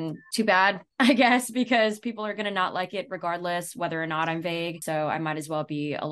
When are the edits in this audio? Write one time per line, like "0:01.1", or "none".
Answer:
0:04.8